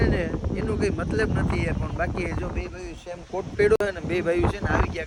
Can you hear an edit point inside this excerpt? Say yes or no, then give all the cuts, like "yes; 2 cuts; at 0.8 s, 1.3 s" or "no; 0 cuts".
no; 0 cuts